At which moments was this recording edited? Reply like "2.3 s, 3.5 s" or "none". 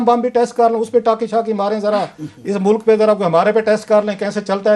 none